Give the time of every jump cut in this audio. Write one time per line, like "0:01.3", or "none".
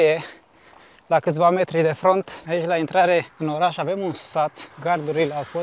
0:02.4
0:04.7